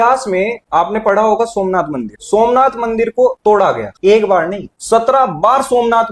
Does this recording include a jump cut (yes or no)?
no